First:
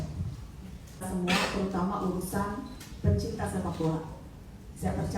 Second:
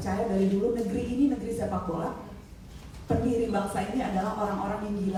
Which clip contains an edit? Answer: first; 1 cut; at 1.1 s

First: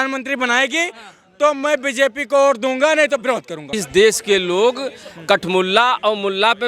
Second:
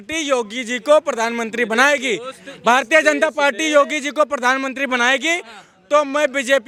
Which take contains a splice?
first; 1 cut; at 3.7 s

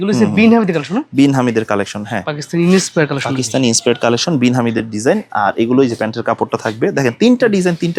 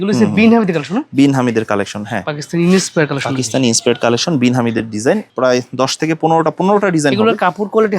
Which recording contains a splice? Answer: second; 1 cut; at 5.3 s

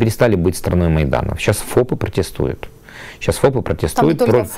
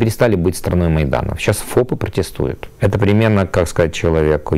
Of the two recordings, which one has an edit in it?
second; 1 cut; at 2.7 s

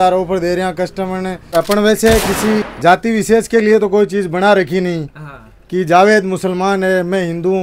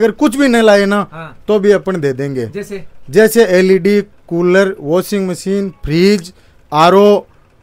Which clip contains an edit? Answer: first; 2 cuts; at 1.5 s, 2.7 s

